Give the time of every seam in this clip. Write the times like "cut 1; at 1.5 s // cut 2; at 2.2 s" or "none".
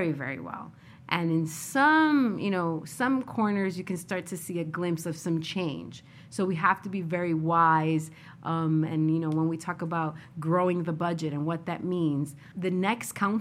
cut 1; at 12.5 s